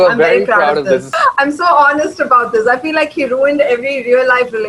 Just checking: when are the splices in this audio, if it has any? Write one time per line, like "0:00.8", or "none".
0:01.1